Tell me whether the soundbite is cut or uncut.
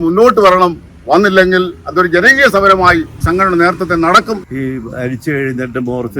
cut